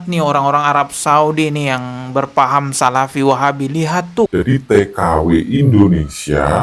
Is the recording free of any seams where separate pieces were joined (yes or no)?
no